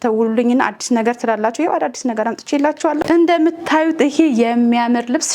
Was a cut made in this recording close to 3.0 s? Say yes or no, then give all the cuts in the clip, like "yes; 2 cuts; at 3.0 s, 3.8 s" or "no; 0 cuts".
yes; 1 cut; at 3.0 s